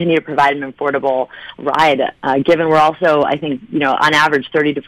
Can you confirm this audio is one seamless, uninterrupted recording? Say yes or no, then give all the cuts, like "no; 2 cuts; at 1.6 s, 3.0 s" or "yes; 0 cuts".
yes; 0 cuts